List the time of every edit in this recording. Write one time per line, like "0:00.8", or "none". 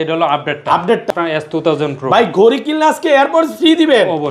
0:01.1